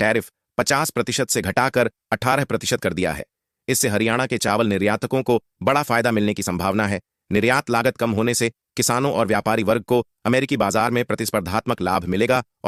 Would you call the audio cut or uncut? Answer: uncut